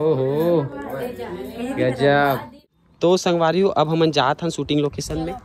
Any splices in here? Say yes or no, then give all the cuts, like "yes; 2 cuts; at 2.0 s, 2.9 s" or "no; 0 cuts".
yes; 1 cut; at 2.5 s